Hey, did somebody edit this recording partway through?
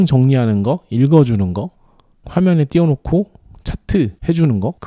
yes; 1 cut; at 2.3 s

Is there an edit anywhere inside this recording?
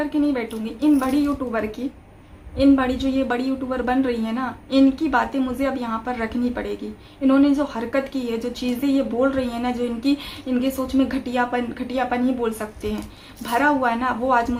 no; 0 cuts

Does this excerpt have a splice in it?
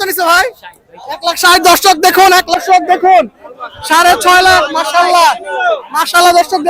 yes; 1 cut; at 2.6 s

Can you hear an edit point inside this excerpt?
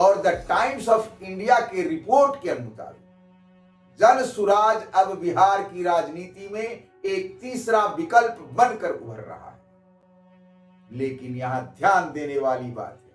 no; 0 cuts

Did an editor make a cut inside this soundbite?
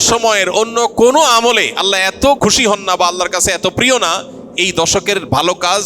yes; 1 cut; at 2.4 s

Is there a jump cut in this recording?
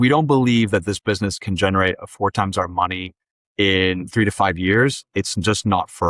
no; 0 cuts

